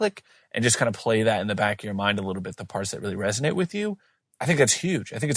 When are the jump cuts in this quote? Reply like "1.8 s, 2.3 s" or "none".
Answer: none